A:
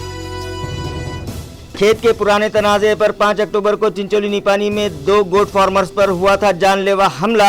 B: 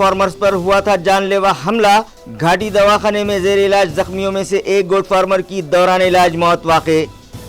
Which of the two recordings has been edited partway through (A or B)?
A